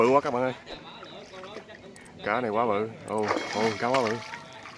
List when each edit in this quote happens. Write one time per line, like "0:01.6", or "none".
none